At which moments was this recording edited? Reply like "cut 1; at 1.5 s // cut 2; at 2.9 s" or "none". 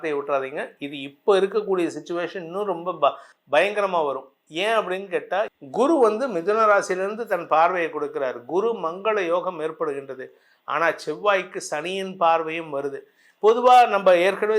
cut 1; at 5.5 s